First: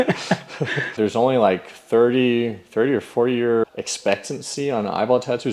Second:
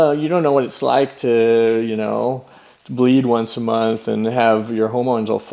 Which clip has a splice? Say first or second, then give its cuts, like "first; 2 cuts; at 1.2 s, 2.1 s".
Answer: first; 2 cuts; at 1.0 s, 3.6 s